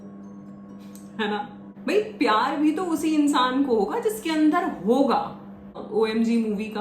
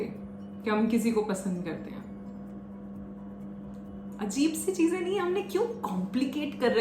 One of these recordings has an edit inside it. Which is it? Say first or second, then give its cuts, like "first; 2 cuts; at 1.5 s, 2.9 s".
first; 2 cuts; at 1.7 s, 5.8 s